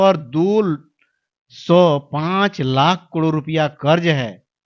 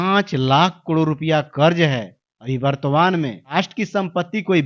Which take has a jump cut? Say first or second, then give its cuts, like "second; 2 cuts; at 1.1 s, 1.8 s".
second; 1 cut; at 3.5 s